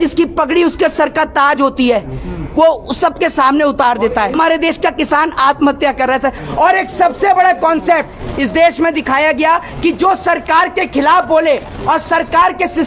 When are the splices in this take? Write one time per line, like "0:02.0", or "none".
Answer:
0:04.4
0:06.4